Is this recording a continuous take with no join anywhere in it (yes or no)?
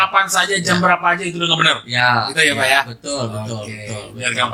yes